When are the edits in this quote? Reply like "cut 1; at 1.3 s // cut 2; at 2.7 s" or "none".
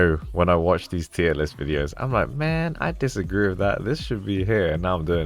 none